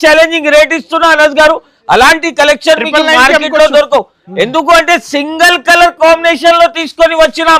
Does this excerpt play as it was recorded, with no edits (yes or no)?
yes